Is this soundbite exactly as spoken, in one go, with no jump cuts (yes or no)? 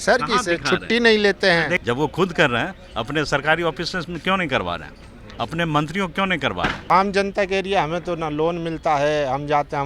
no